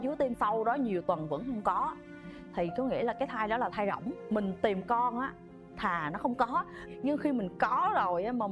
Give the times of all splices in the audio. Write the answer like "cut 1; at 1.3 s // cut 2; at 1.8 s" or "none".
cut 1; at 4.2 s